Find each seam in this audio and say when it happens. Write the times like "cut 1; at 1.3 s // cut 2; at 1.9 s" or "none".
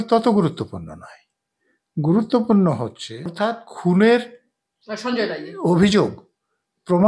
cut 1; at 3.3 s